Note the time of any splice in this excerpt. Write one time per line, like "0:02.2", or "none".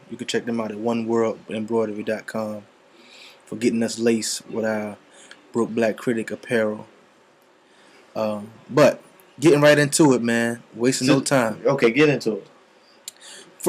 0:10.6

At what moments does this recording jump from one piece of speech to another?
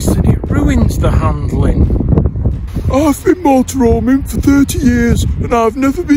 0:02.7

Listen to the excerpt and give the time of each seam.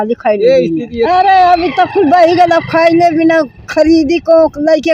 0:01.1

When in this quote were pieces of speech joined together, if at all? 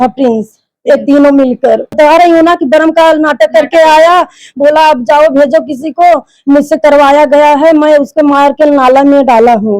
0:01.9

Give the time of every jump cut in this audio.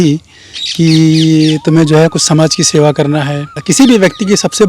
0:03.5

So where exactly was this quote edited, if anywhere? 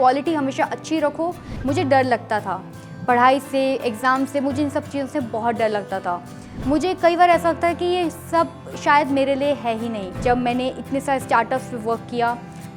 0:01.5
0:10.2

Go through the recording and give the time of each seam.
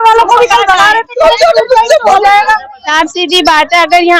0:02.8

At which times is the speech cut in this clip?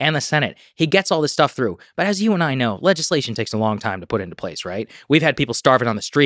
none

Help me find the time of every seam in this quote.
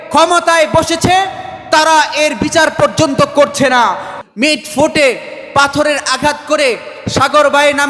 0:04.2

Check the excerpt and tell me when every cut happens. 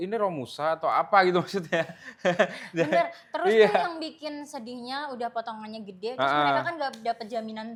none

